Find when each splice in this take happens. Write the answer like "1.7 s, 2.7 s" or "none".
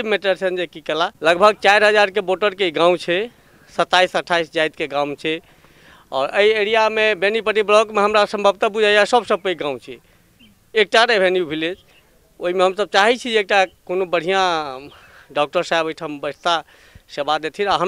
1.1 s